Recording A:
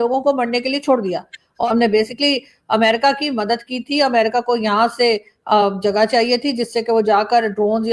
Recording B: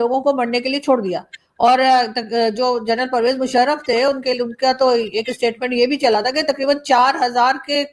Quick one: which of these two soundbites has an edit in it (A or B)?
A